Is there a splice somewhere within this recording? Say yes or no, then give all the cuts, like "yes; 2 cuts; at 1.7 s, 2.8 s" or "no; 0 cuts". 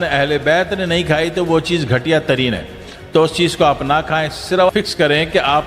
yes; 1 cut; at 4.7 s